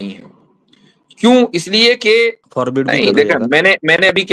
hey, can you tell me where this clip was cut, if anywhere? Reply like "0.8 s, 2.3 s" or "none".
2.4 s